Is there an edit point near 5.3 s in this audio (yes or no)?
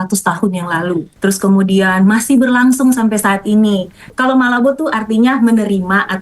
no